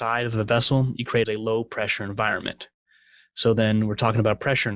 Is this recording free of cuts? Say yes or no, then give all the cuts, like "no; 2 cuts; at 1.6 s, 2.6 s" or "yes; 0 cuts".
no; 1 cut; at 1.3 s